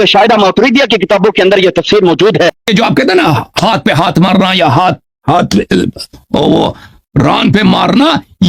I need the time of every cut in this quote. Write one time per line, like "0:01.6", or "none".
0:02.7